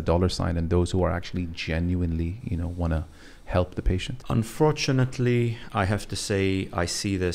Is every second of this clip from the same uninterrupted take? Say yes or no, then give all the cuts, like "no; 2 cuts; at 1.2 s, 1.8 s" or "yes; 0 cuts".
no; 1 cut; at 4.1 s